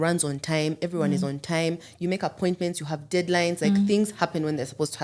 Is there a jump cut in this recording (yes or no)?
no